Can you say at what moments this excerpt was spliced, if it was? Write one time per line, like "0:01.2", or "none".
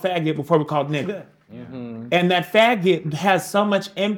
none